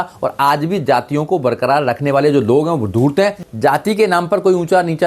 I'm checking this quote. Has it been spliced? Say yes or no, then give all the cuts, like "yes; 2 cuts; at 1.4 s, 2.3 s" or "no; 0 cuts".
yes; 1 cut; at 3.4 s